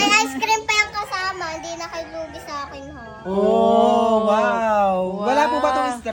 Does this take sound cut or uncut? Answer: uncut